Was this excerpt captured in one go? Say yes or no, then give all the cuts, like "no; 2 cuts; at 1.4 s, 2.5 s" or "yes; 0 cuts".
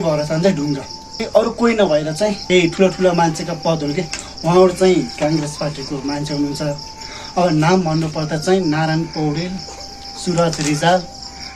no; 1 cut; at 2.4 s